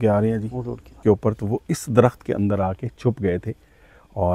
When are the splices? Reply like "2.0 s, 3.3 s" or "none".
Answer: 1.0 s